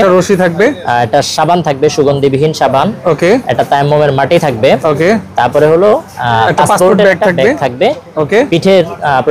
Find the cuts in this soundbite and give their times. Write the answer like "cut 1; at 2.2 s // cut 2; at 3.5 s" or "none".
none